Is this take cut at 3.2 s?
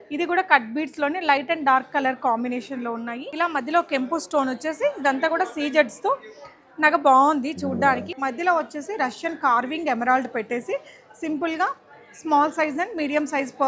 yes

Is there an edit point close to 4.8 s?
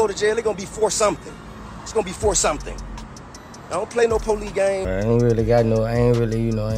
yes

